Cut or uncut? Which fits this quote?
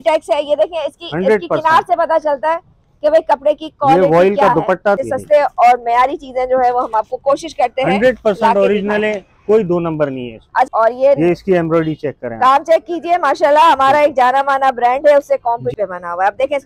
cut